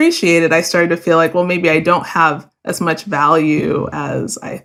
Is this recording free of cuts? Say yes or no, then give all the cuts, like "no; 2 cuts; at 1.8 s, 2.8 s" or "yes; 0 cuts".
yes; 0 cuts